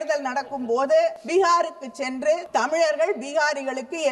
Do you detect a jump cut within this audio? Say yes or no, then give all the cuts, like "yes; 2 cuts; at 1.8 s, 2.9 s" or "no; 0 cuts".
yes; 2 cuts; at 1.2 s, 2.4 s